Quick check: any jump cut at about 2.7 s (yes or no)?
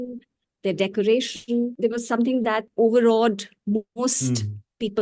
yes